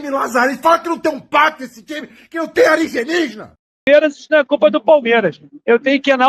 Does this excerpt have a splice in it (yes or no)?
yes